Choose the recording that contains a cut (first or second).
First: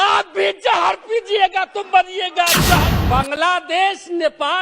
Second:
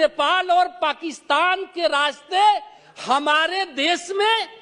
first